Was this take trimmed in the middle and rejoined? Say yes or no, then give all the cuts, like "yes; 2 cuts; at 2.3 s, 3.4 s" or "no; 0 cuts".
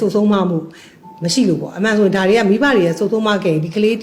no; 0 cuts